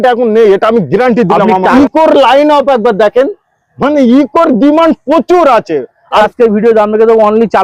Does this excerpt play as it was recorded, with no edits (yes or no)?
no